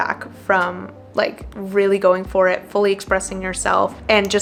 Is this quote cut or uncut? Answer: uncut